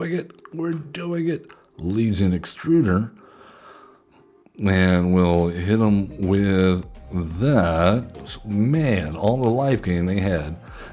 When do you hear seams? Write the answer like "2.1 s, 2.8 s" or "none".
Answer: 8.4 s